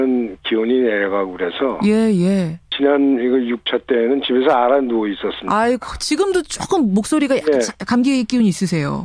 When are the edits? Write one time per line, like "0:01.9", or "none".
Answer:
0:02.6